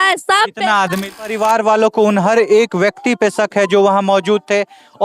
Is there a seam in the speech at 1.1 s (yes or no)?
yes